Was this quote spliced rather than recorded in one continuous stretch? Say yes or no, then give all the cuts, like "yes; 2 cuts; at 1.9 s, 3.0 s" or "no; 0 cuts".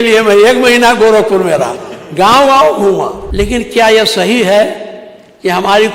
yes; 1 cut; at 3.2 s